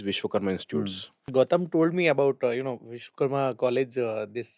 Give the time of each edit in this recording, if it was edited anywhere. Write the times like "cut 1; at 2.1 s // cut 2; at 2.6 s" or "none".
cut 1; at 1.3 s